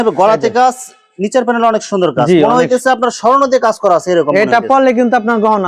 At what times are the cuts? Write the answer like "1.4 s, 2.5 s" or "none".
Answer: none